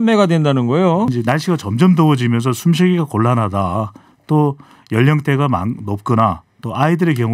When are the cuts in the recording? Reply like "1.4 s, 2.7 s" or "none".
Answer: 1.1 s